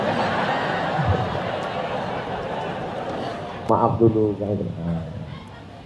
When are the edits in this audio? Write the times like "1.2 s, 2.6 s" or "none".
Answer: 3.7 s